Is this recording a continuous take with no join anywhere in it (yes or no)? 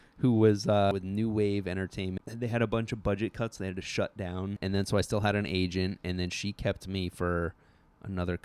no